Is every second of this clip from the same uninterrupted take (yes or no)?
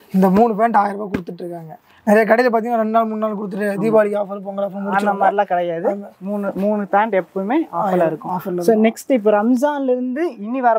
yes